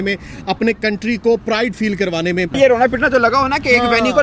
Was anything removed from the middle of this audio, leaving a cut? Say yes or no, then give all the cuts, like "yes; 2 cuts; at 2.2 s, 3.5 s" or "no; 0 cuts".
yes; 1 cut; at 2.6 s